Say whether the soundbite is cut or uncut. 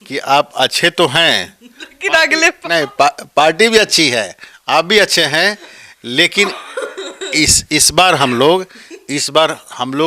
uncut